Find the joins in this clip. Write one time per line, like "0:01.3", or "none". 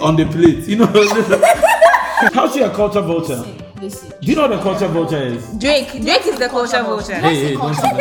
0:02.3